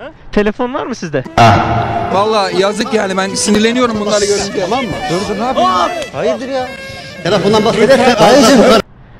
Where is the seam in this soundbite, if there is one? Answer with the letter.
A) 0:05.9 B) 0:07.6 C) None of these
C